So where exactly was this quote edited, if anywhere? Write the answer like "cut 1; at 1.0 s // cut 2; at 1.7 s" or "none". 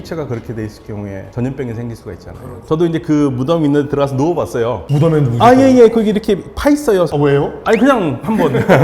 cut 1; at 2.6 s // cut 2; at 7.1 s

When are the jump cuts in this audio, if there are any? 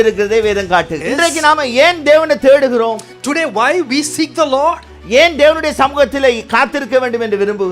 cut 1; at 1.0 s

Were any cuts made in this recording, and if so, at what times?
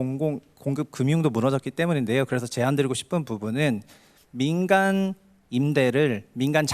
none

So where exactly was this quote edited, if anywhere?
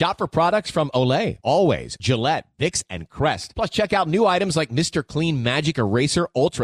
none

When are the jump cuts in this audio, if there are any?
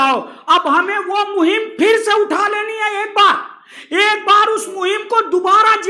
none

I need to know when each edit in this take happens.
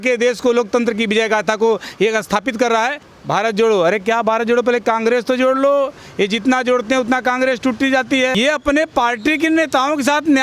cut 1; at 3.1 s // cut 2; at 8.3 s

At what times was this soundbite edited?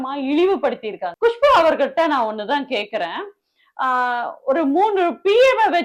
cut 1; at 1.0 s

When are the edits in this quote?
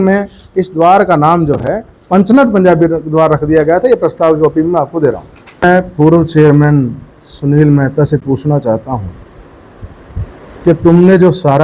cut 1; at 5.6 s

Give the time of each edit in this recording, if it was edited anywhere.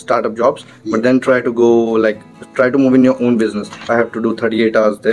cut 1; at 3.8 s

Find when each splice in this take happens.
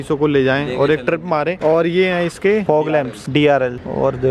none

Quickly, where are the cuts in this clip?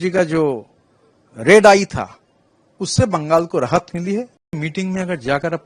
cut 1; at 4.6 s

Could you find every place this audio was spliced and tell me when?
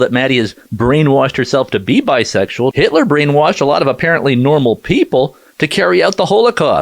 cut 1; at 2.7 s

